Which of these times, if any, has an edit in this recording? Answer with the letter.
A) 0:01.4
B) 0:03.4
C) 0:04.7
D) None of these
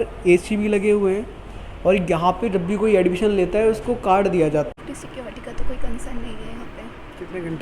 C